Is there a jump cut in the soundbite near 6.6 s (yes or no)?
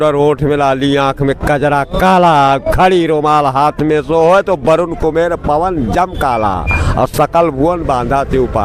no